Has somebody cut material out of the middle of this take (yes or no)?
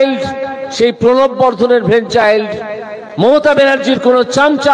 no